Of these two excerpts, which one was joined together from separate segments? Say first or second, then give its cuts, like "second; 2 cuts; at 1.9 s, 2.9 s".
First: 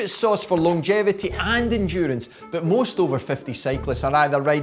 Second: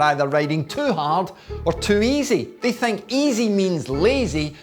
second; 1 cut; at 2.5 s